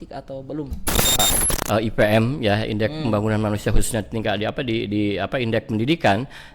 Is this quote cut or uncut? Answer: cut